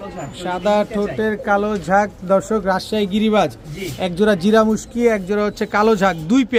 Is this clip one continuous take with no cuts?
yes; 0 cuts

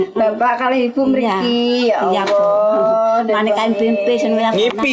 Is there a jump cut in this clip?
no; 0 cuts

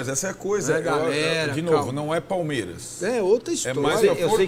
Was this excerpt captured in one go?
yes; 0 cuts

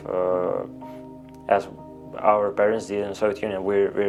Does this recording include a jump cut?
no; 0 cuts

